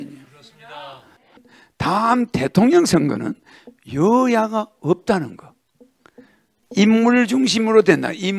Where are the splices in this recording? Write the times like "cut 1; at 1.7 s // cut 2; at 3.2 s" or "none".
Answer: cut 1; at 1.3 s

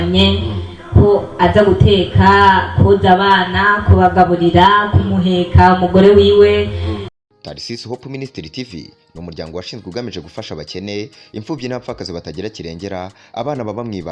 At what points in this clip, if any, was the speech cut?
cut 1; at 7.1 s

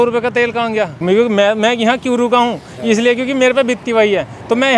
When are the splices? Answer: cut 1; at 1.0 s

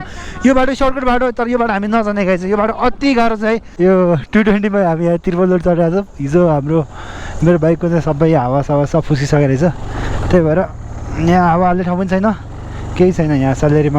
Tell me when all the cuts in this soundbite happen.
cut 1; at 3.7 s

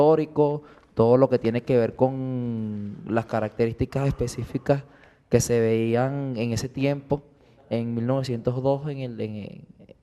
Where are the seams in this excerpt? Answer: cut 1; at 8.7 s

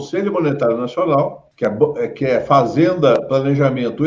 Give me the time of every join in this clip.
cut 1; at 1.4 s

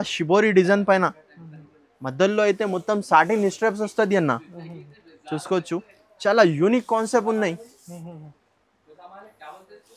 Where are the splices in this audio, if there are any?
none

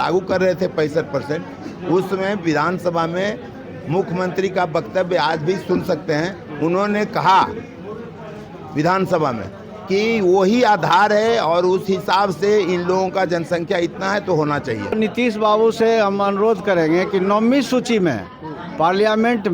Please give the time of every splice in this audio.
cut 1; at 14.9 s

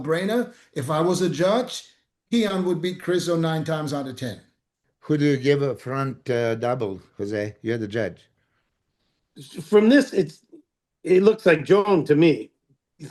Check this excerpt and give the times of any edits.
cut 1; at 4.8 s

